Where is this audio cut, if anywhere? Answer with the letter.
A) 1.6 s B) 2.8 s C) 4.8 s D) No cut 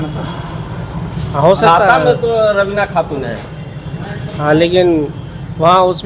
D